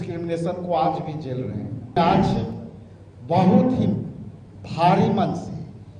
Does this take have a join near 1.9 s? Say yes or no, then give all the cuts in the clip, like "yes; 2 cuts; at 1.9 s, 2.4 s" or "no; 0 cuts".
yes; 1 cut; at 1.9 s